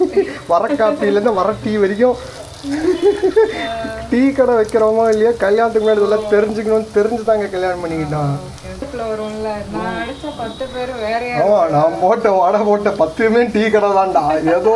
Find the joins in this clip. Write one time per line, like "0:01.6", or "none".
0:08.9